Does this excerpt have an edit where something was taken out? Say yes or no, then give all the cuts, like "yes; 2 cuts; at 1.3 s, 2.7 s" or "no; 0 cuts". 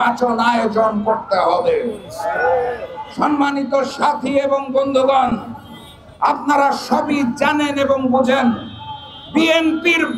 no; 0 cuts